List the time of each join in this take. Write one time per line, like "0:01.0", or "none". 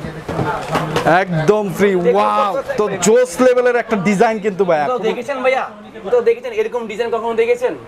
0:02.7